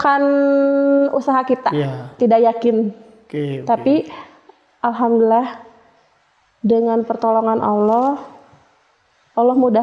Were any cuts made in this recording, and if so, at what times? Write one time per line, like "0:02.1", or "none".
none